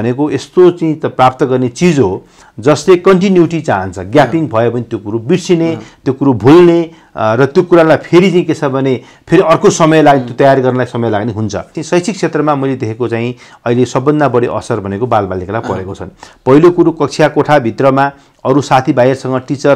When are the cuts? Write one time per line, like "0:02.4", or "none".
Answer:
0:11.8